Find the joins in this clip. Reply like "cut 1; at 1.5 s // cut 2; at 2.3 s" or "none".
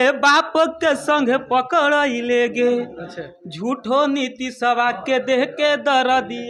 none